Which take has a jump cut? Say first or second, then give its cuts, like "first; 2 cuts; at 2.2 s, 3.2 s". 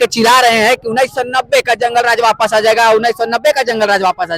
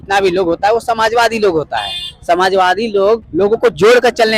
second; 1 cut; at 3.3 s